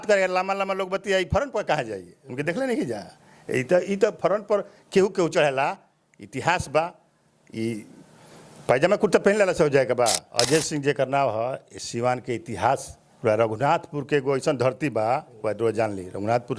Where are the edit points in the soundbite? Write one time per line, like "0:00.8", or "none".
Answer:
0:10.3